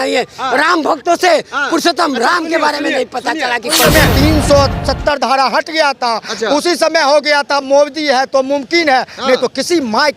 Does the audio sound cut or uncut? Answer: cut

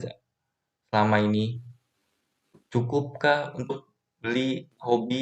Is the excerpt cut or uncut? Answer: uncut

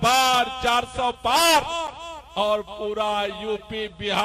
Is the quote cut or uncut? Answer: uncut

